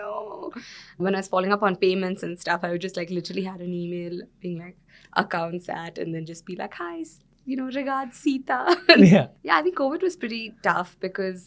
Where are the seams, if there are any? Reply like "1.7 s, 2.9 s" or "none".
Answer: 0.9 s, 9.3 s